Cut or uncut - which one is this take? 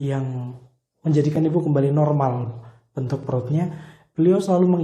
uncut